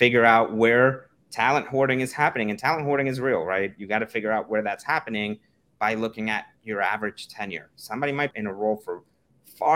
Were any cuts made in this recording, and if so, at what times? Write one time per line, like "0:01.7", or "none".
0:08.3